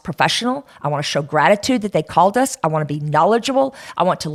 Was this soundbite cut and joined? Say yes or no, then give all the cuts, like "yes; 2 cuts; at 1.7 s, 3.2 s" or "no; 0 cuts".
no; 0 cuts